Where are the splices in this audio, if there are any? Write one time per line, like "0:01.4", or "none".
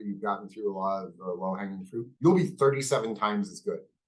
0:02.1